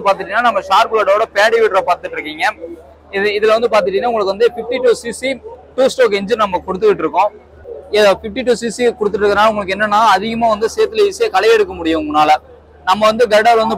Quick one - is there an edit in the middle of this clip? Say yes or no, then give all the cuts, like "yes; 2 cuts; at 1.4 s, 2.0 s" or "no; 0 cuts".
no; 0 cuts